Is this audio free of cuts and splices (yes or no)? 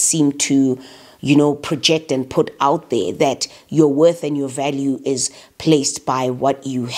yes